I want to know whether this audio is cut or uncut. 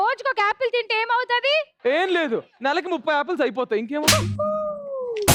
uncut